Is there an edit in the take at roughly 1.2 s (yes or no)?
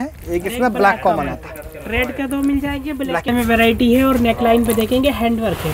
no